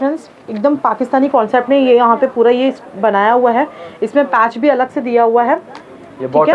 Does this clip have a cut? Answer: no; 0 cuts

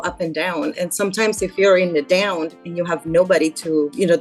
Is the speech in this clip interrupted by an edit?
no; 0 cuts

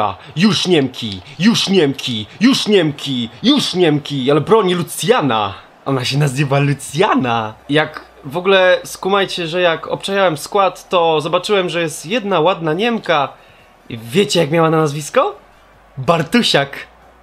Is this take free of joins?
no; 1 cut; at 13.4 s

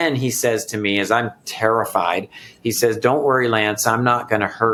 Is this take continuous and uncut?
yes; 0 cuts

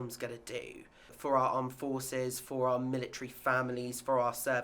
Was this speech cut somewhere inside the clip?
yes; 1 cut; at 1.1 s

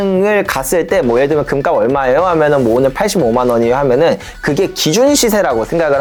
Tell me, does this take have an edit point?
no; 0 cuts

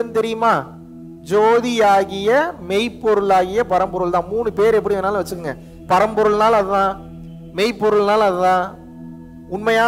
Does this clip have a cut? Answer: no; 0 cuts

